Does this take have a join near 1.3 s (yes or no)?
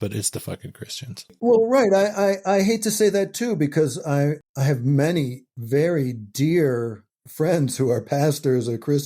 yes